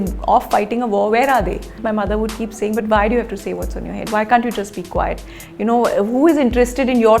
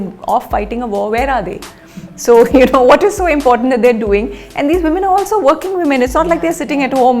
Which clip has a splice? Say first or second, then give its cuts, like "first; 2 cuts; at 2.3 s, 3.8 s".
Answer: first; 1 cut; at 1.8 s